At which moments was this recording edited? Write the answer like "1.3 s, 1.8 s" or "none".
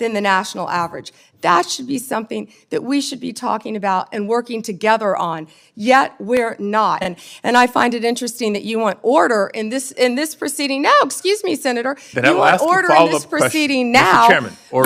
7.2 s